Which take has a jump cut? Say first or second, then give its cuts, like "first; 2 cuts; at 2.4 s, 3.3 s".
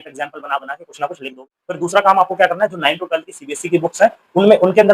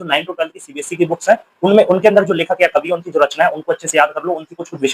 first; 1 cut; at 1.6 s